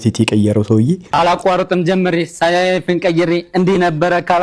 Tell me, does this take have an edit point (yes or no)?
yes